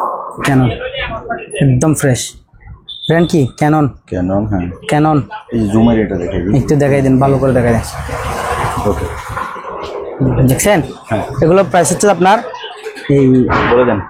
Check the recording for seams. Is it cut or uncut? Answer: uncut